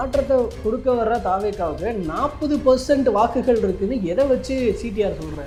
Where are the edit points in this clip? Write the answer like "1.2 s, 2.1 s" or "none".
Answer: none